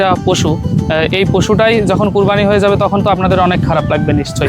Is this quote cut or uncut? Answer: uncut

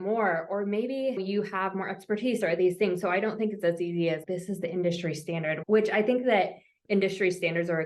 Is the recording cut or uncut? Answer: cut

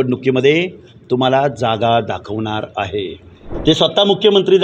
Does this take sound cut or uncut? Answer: cut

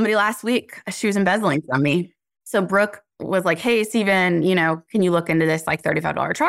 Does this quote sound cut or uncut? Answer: cut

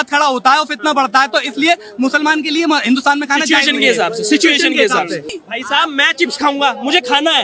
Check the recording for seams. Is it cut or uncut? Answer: cut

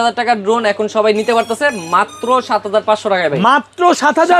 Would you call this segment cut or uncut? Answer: uncut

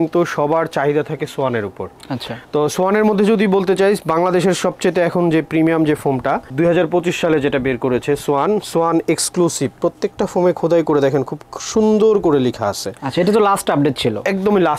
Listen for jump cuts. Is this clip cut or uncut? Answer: uncut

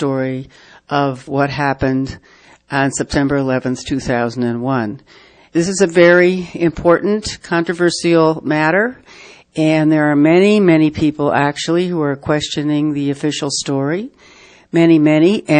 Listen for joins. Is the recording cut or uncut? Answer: uncut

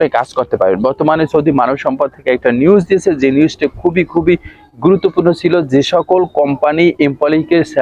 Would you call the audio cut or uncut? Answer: uncut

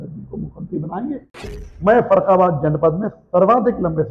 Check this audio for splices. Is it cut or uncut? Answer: cut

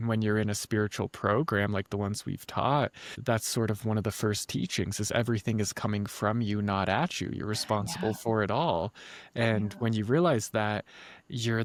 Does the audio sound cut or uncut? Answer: uncut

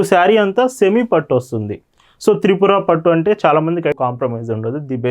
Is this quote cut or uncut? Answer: cut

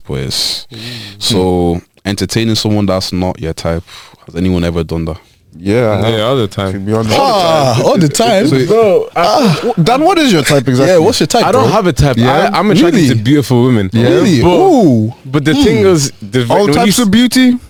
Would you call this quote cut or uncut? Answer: uncut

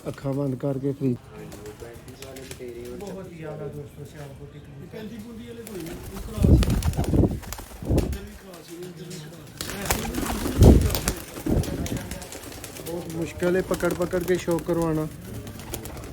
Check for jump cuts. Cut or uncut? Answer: cut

